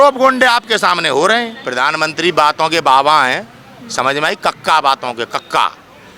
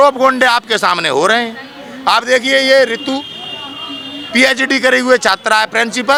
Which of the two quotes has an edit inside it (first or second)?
first